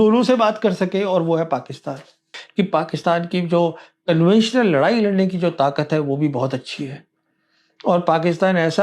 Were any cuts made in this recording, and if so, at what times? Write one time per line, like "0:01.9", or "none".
0:02.4